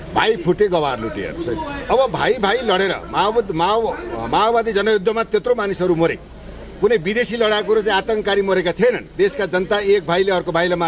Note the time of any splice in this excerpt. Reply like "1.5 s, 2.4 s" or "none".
none